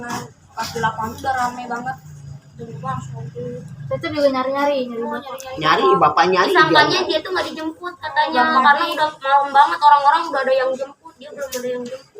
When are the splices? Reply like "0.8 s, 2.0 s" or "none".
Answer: 2.5 s